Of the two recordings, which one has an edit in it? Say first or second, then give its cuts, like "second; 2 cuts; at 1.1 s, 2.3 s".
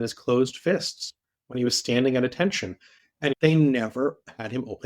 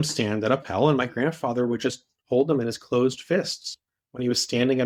first; 1 cut; at 3.4 s